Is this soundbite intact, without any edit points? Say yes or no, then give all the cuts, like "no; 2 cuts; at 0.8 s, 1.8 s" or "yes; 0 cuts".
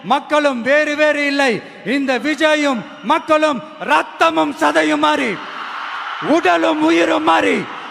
yes; 0 cuts